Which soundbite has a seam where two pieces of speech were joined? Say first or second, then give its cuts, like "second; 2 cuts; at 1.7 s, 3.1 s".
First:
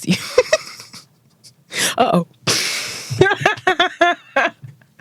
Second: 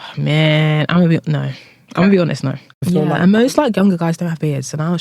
second; 1 cut; at 2.8 s